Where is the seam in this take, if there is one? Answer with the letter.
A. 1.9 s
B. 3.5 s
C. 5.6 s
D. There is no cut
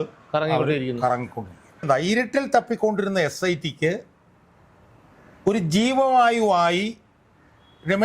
A